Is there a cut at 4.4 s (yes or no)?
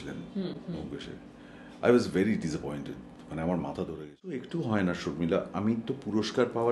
yes